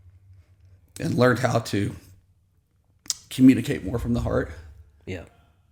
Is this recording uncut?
yes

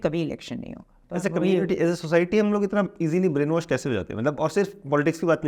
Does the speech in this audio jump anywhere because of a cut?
yes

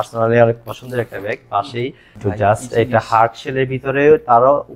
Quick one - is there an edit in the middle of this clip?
yes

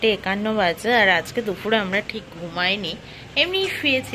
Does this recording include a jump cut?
no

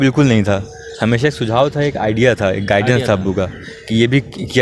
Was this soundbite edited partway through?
no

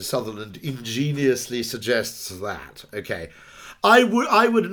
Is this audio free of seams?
yes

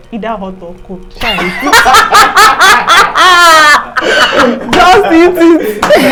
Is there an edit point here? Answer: no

